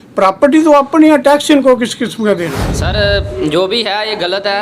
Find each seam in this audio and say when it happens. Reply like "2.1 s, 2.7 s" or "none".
2.7 s